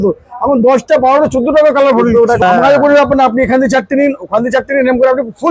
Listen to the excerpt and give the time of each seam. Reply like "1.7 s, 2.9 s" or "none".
2.4 s

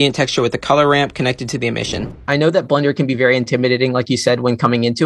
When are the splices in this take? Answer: 2.2 s

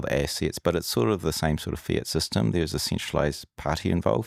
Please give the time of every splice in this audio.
none

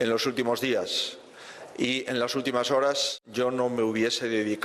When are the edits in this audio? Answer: 3.2 s

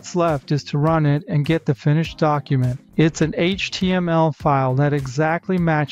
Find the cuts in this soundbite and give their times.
2.7 s

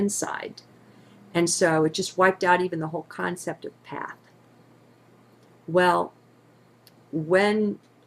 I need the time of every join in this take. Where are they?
5.9 s

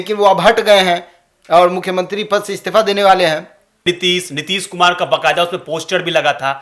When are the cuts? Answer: 3.8 s

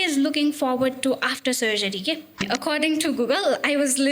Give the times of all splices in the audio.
2.4 s

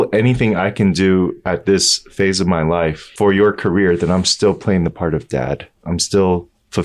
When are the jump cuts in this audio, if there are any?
3.0 s, 5.7 s

